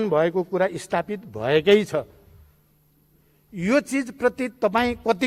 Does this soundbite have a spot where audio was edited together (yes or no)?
no